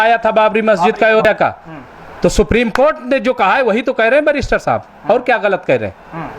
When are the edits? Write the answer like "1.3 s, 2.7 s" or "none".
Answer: 1.2 s